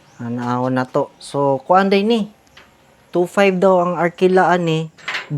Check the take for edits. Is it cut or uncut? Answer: uncut